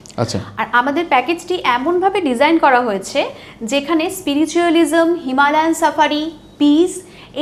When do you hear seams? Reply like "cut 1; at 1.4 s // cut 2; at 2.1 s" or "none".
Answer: none